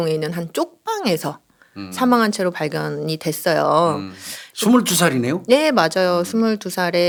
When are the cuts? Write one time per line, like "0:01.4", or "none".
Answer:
none